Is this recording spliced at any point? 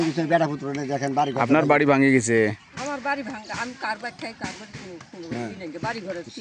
no; 0 cuts

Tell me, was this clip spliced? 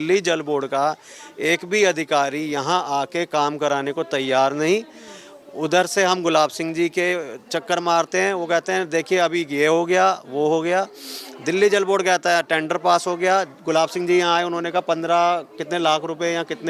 no; 0 cuts

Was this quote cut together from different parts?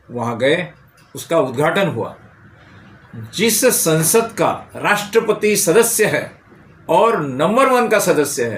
no; 0 cuts

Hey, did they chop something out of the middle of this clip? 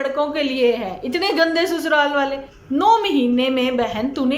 yes; 1 cut; at 2.5 s

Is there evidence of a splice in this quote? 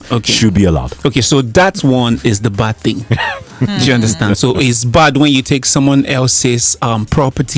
no; 0 cuts

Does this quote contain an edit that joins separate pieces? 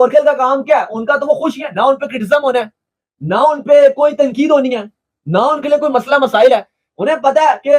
no; 0 cuts

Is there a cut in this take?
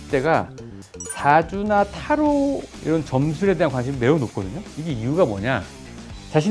no; 0 cuts

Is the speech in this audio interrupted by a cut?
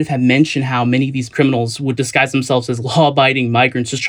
no; 0 cuts

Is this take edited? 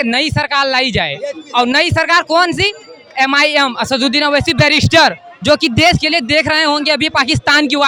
no; 0 cuts

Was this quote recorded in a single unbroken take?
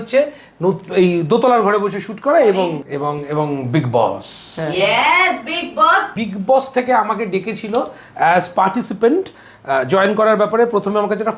no; 2 cuts; at 2.8 s, 6.1 s

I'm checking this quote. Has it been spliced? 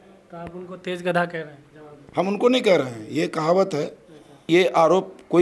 yes; 1 cut; at 4.4 s

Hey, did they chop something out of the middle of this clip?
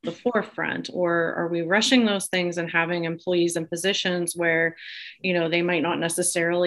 no; 0 cuts

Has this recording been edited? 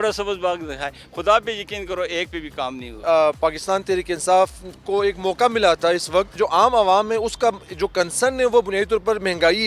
yes; 2 cuts; at 3.0 s, 6.4 s

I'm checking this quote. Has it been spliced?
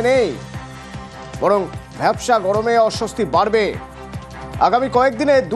no; 0 cuts

